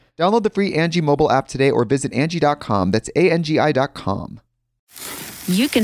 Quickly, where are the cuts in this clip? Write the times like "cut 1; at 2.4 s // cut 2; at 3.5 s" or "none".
cut 1; at 4.8 s